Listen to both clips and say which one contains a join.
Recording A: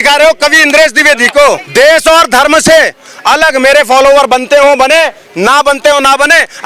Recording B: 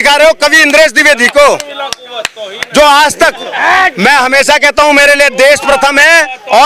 A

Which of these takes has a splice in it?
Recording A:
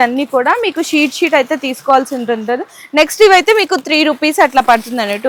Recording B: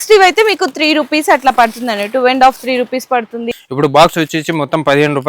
B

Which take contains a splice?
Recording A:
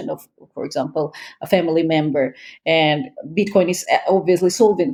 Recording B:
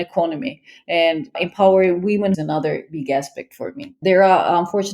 B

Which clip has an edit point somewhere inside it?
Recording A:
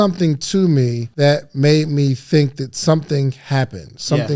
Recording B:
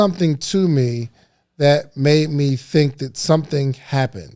A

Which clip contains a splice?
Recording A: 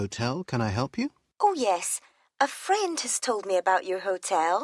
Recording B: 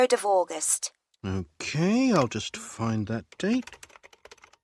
A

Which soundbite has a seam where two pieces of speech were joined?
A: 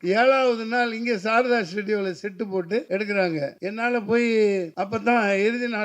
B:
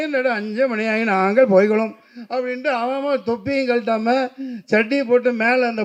A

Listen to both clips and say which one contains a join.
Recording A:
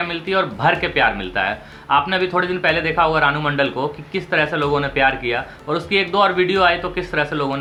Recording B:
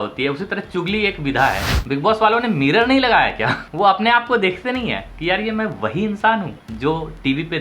B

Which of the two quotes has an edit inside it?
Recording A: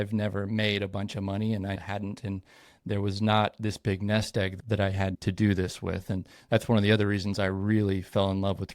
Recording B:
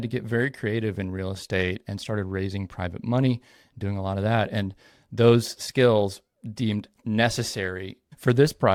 A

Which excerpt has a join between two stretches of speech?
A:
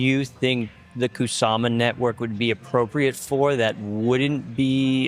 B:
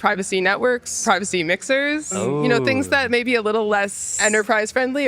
B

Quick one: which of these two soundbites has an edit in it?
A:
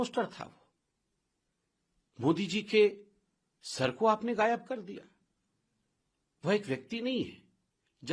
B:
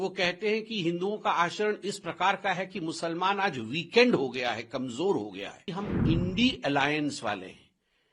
B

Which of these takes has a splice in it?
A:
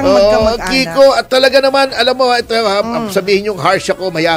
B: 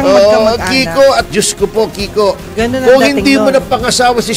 B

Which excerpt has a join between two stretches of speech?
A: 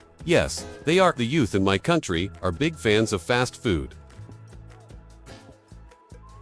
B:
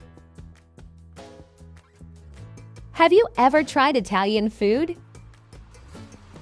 B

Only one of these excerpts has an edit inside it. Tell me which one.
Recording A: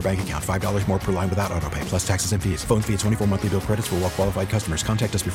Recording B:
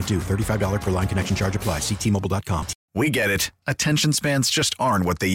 B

